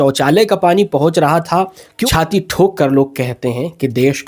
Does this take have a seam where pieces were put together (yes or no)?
yes